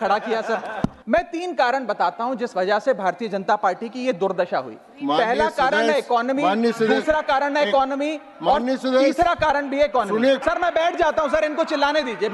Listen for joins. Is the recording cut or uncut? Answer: cut